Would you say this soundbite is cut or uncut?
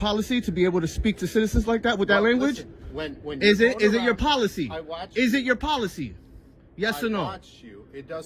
uncut